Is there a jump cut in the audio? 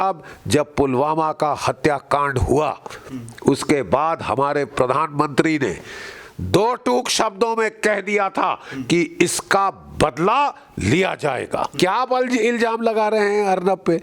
yes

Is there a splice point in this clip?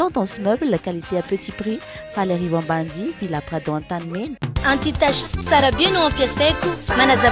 no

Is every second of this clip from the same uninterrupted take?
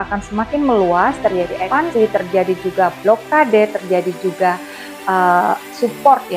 no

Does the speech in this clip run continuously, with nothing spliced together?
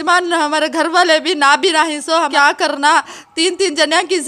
no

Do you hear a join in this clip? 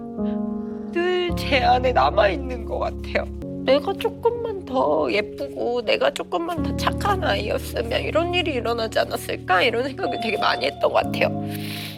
yes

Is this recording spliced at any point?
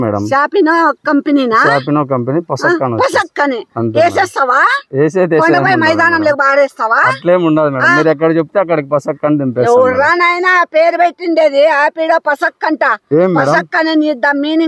no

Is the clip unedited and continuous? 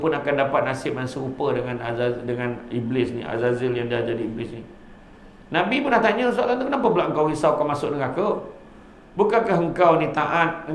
yes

